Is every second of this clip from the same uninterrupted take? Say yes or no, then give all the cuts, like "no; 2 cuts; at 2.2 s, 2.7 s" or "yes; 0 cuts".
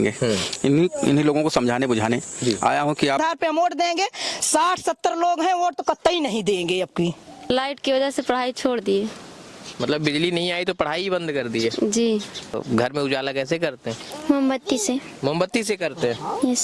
no; 3 cuts; at 3.2 s, 7.4 s, 12.6 s